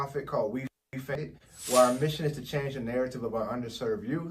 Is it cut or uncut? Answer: cut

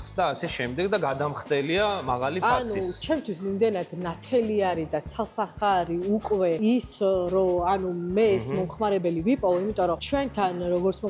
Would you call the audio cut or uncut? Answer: uncut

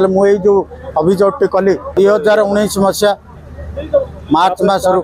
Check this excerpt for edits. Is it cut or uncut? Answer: cut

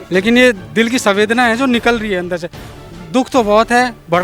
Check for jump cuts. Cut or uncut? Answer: uncut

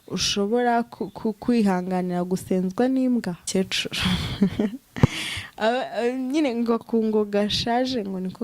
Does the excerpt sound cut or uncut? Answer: cut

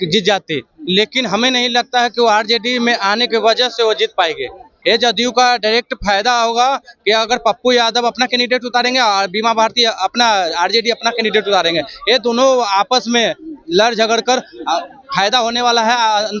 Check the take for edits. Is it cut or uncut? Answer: cut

